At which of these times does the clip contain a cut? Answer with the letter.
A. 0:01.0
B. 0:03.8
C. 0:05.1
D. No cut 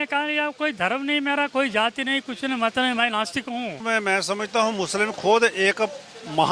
B